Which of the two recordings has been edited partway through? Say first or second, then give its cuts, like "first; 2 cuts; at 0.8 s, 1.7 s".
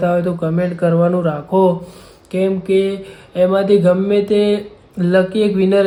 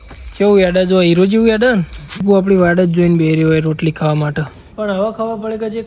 second; 2 cuts; at 2.2 s, 4.6 s